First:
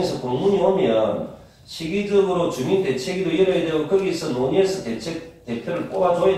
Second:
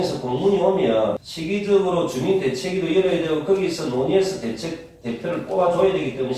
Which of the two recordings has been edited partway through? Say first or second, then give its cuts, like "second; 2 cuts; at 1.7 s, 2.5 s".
second; 1 cut; at 1.3 s